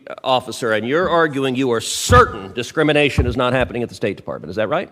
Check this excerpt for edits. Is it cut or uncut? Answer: uncut